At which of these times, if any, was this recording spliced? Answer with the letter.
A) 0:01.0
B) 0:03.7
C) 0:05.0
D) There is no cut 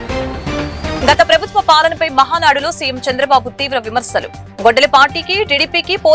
A